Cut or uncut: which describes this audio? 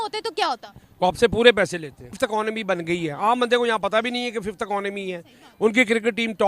cut